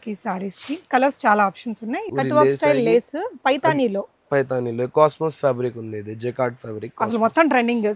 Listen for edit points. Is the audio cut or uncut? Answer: cut